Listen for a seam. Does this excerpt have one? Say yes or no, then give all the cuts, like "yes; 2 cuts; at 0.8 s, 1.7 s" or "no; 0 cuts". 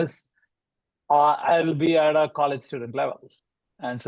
no; 0 cuts